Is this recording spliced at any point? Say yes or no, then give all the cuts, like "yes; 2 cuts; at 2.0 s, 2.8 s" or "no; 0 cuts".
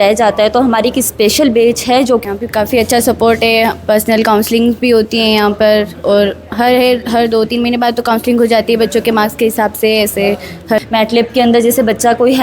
yes; 2 cuts; at 2.2 s, 10.8 s